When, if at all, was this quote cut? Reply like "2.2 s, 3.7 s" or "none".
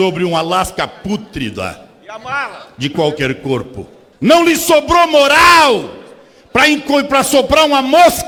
none